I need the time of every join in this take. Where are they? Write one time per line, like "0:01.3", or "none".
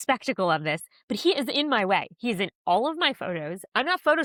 none